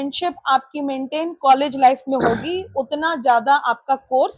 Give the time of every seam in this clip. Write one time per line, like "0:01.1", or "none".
none